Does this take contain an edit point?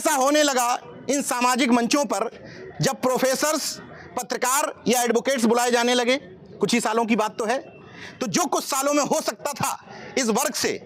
no; 0 cuts

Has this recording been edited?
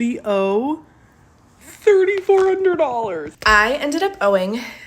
yes; 1 cut; at 3.3 s

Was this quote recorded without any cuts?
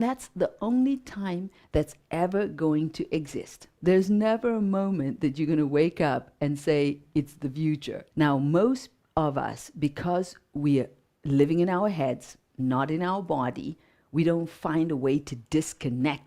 no; 2 cuts; at 3.7 s, 8.0 s

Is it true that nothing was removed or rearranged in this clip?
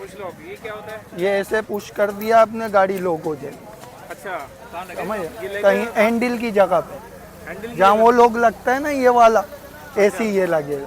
yes; 0 cuts

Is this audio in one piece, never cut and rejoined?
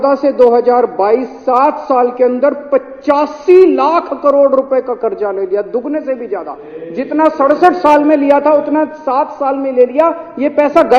yes; 0 cuts

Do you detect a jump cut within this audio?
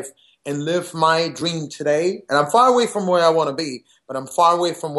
no; 0 cuts

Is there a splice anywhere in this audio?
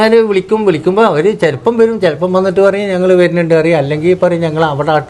no; 0 cuts

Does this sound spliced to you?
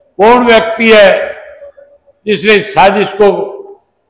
no; 0 cuts

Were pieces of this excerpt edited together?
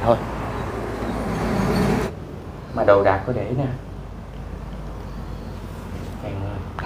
yes; 1 cut; at 2.1 s

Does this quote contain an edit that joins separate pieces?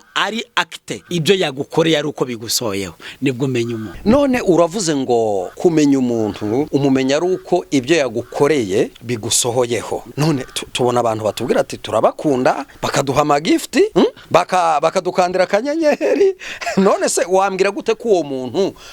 yes; 8 cuts; at 0.9 s, 3.9 s, 5.5 s, 6.7 s, 9.0 s, 10.1 s, 12.7 s, 14.0 s

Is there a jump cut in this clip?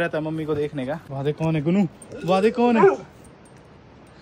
no; 0 cuts

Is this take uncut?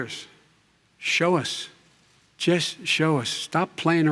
yes; 0 cuts

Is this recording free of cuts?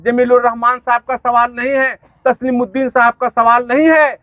yes; 0 cuts

